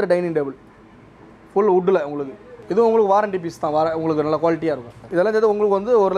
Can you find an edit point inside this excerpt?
yes; 1 cut; at 5.0 s

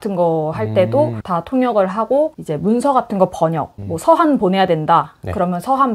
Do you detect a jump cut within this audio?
yes; 1 cut; at 1.2 s

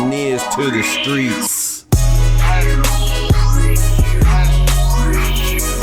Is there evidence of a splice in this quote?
no; 0 cuts

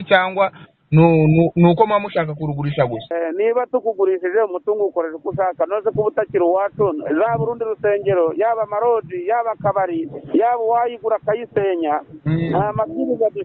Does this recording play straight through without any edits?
no; 1 cut; at 3.1 s

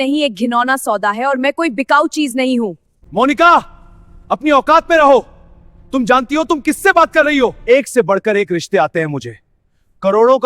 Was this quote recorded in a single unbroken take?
no; 2 cuts; at 3.0 s, 7.6 s

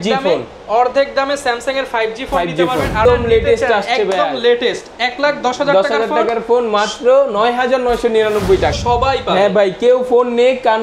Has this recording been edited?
yes; 2 cuts; at 3.0 s, 8.8 s

